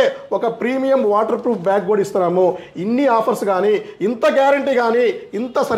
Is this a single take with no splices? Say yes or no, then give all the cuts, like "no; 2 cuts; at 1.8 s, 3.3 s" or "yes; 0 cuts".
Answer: yes; 0 cuts